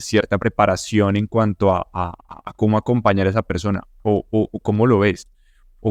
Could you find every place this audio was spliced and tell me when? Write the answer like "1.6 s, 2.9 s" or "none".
none